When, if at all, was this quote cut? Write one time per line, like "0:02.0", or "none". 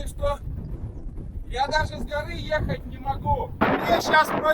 0:03.6